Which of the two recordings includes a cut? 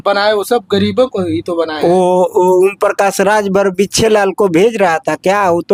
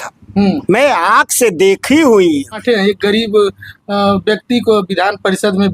second; 1 cut; at 2.6 s

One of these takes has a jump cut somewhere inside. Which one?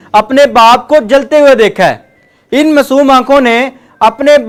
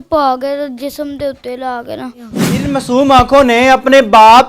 second; 1 cut; at 2.4 s

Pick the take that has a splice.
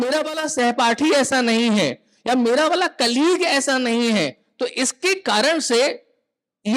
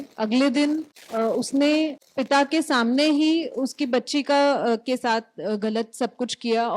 second; 2 cuts; at 1.0 s, 2.1 s

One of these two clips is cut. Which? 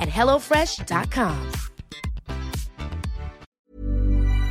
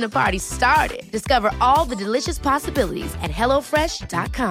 first; 1 cut; at 3.5 s

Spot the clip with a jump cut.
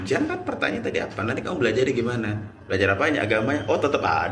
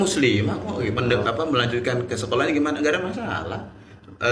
second; 1 cut; at 1.0 s

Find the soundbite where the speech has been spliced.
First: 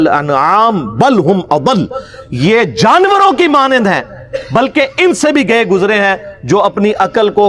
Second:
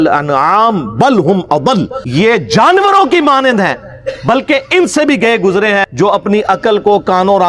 second; 2 cuts; at 2.0 s, 5.9 s

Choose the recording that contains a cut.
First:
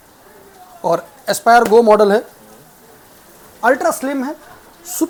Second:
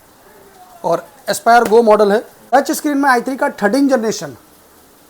second; 1 cut; at 2.4 s

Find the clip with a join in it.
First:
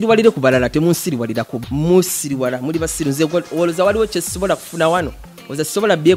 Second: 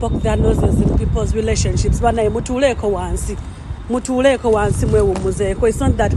first; 1 cut; at 1.5 s

